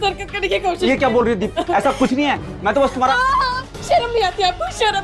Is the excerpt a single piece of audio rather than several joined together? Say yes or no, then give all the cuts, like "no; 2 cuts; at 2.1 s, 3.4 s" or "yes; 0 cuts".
yes; 0 cuts